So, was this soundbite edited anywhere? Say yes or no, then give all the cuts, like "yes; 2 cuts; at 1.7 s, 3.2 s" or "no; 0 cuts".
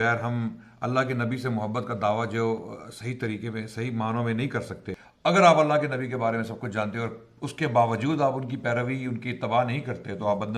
yes; 1 cut; at 5.0 s